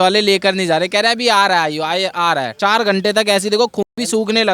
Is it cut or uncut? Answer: uncut